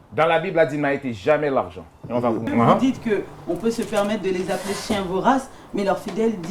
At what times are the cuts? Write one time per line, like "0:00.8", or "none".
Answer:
0:02.5